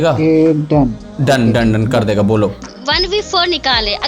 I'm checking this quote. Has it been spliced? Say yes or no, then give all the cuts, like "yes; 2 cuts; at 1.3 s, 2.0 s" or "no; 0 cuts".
yes; 1 cut; at 2.6 s